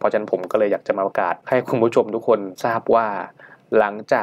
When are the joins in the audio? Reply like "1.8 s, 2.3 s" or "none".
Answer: 1.4 s, 2.5 s